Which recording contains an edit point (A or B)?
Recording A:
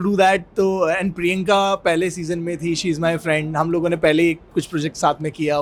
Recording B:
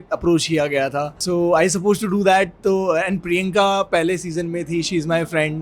B